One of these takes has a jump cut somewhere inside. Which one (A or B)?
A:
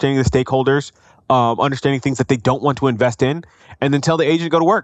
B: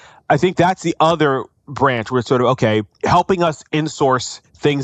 B